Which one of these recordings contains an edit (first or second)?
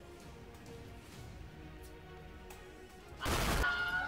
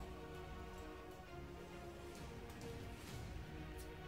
first